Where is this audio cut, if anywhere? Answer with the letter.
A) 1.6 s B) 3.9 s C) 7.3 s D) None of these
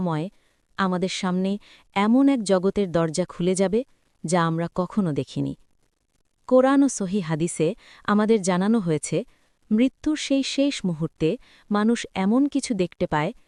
D